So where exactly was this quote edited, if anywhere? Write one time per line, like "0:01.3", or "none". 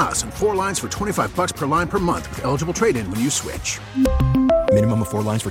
none

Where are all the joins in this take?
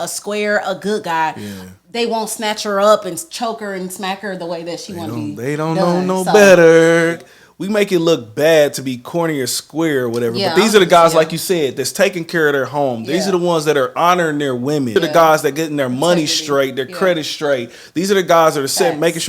0:07.2
0:14.9

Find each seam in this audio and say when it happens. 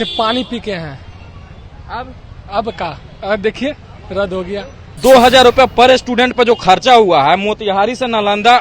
0:05.0

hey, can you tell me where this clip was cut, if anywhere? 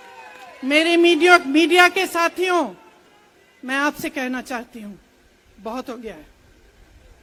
none

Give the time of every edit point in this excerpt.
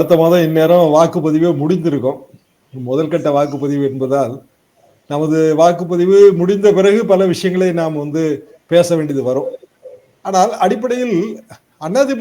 none

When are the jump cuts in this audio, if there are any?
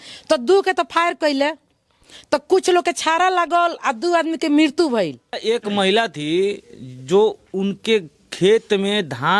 0:05.4

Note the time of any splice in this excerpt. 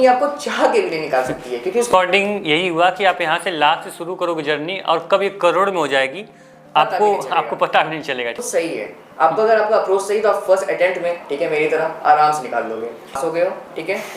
0:01.9
0:08.4
0:13.2

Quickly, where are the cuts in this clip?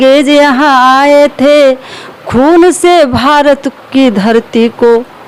none

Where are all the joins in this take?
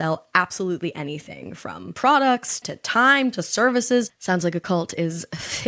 0:01.9
0:02.7

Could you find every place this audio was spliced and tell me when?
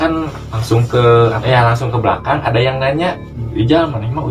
0:01.4
0:03.3

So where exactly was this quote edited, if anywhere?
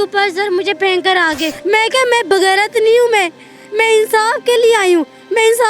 0:01.5

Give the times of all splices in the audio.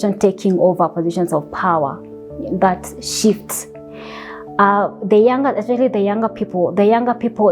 none

